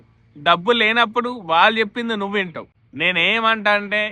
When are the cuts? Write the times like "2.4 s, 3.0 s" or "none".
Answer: none